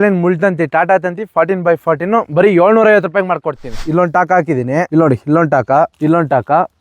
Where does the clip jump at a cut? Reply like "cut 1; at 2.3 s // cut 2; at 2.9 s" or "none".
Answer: cut 1; at 3.8 s